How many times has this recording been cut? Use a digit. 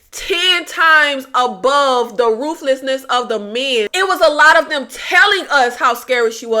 1